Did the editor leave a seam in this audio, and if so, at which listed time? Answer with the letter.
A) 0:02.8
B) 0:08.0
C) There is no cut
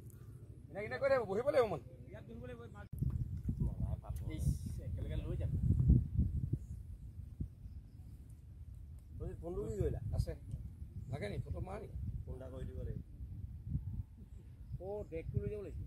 A